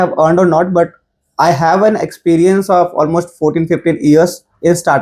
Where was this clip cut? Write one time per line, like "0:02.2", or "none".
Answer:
none